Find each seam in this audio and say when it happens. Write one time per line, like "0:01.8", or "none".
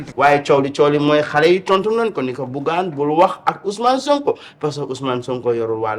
none